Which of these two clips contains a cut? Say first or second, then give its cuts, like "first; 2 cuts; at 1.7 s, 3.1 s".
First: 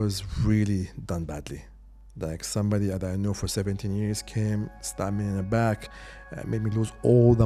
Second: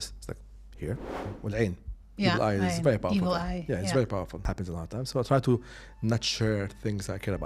second; 2 cuts; at 1.3 s, 4.4 s